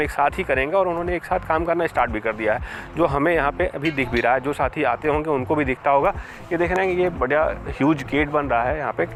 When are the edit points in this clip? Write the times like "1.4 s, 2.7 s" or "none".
none

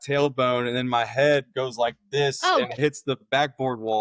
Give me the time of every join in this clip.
2.8 s

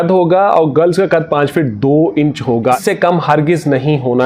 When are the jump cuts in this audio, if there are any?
2.8 s

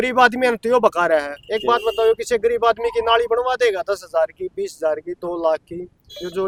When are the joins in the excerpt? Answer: none

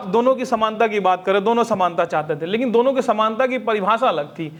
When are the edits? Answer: none

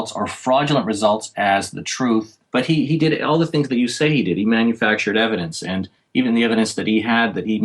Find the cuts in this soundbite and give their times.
2.4 s

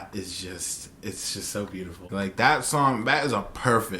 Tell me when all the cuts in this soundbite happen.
2.0 s

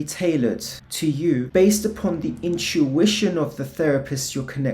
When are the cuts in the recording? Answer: 1.2 s

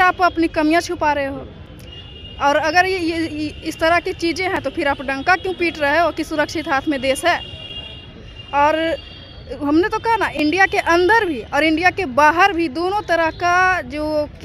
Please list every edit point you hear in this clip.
none

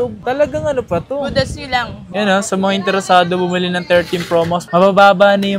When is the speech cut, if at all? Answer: 2.0 s

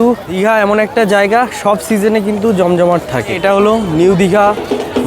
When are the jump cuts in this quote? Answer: 0.8 s, 3.4 s

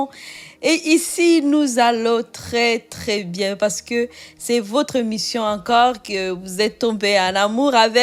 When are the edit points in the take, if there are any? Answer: none

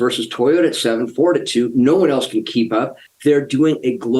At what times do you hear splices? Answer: 3.0 s

